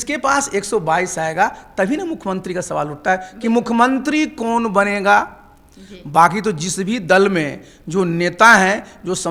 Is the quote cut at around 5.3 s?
no; 0 cuts

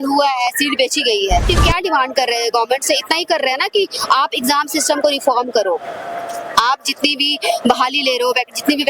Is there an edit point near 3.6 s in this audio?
no; 1 cut; at 1.4 s

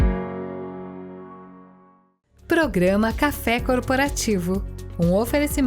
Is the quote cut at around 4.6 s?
no; 1 cut; at 2.0 s

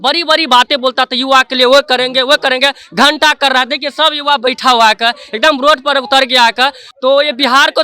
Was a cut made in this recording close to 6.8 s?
yes; 1 cut; at 6.8 s

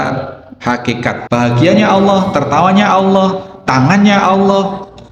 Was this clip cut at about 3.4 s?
no; 1 cut; at 1.2 s

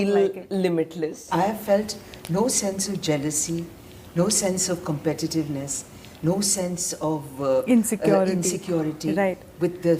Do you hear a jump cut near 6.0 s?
no; 1 cut; at 1.2 s

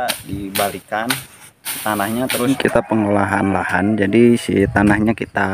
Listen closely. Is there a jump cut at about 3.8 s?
no; 1 cut; at 2.5 s

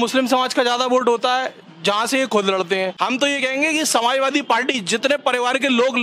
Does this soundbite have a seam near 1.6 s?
no; 1 cut; at 2.9 s

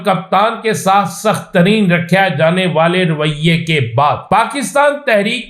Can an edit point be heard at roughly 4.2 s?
yes; 1 cut; at 4.2 s

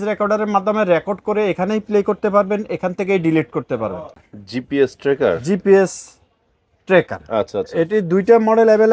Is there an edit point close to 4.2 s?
yes; 1 cut; at 4.2 s

